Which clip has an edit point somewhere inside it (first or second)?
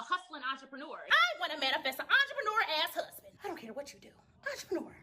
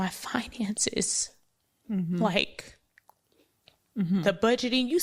first